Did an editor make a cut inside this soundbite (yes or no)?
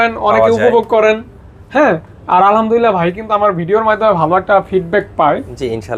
no